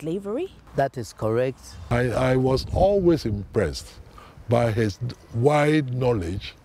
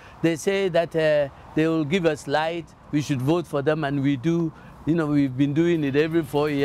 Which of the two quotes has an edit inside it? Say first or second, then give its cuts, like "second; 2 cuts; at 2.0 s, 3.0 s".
first; 1 cut; at 1.7 s